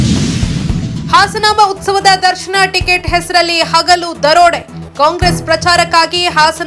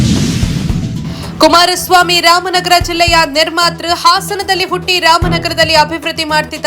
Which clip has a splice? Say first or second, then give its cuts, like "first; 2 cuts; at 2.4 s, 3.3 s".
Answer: second; 1 cut; at 1.0 s